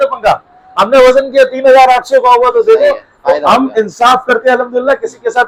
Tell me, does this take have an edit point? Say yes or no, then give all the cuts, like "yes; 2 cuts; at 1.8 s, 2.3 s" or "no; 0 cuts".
no; 0 cuts